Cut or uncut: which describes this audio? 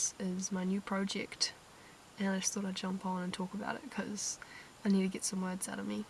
uncut